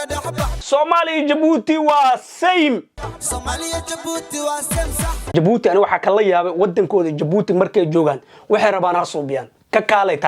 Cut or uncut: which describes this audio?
cut